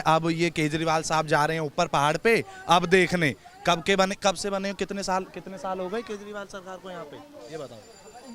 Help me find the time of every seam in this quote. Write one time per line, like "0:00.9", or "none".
none